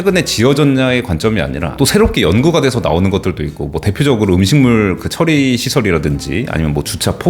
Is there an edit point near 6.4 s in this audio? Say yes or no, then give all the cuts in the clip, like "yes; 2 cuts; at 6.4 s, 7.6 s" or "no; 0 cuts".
no; 1 cut; at 1.7 s